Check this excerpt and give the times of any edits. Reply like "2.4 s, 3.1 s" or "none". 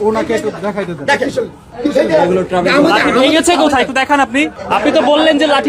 1.6 s, 4.6 s